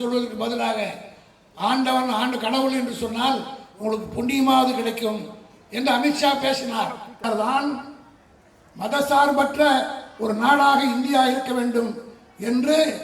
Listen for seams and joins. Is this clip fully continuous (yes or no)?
no